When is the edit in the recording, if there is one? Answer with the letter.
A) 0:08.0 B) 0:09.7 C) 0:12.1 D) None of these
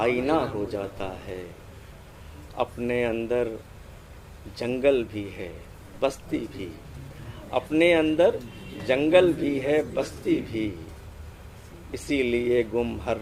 D